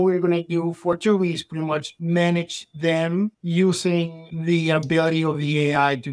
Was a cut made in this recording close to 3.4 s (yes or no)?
yes